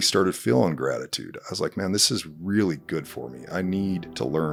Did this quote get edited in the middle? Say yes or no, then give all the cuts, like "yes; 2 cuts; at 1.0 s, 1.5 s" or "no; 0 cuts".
no; 0 cuts